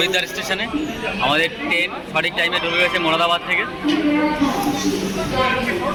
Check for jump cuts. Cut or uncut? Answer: uncut